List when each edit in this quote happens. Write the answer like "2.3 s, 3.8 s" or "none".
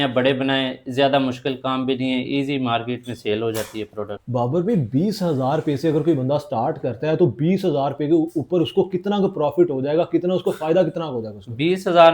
none